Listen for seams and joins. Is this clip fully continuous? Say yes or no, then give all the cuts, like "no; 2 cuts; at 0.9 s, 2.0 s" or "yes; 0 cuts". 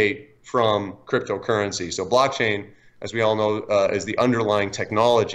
yes; 0 cuts